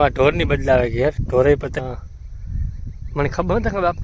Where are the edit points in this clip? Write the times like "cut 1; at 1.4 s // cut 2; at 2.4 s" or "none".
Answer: cut 1; at 1.7 s